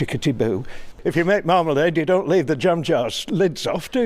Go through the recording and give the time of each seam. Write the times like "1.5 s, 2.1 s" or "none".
0.9 s